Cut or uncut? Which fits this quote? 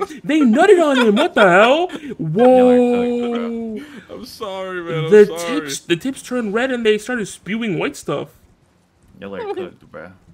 uncut